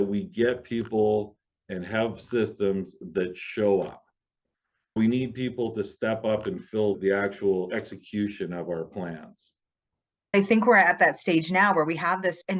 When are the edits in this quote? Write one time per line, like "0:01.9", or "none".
0:05.0
0:10.3